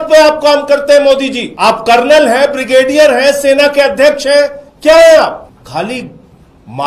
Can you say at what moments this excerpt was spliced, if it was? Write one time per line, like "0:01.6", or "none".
0:01.4
0:05.5